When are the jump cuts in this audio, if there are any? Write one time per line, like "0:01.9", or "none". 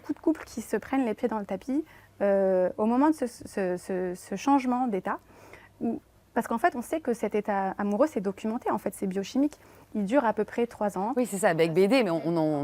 none